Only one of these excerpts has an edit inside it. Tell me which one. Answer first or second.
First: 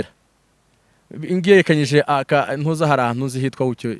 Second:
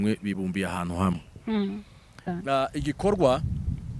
second